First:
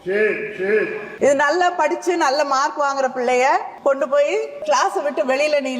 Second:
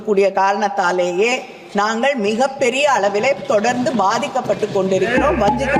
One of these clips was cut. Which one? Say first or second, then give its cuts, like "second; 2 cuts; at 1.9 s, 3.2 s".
first; 3 cuts; at 1.0 s, 3.7 s, 4.6 s